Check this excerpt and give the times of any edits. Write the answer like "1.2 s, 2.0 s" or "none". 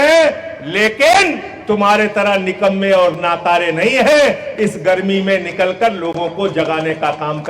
none